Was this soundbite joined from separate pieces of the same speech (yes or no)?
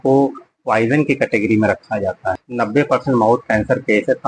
yes